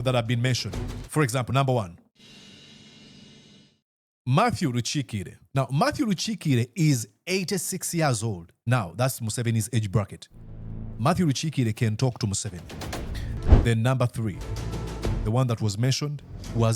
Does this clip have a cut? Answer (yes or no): yes